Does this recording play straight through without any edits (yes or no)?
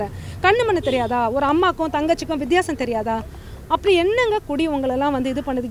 yes